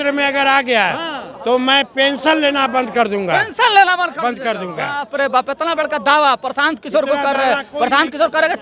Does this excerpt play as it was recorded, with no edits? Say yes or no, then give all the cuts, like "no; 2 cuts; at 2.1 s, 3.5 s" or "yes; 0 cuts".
yes; 0 cuts